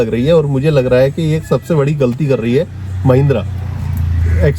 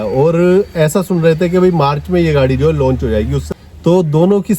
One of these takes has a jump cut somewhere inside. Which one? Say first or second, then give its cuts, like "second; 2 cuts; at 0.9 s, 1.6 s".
second; 1 cut; at 3.4 s